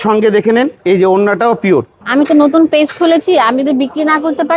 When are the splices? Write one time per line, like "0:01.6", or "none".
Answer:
0:02.0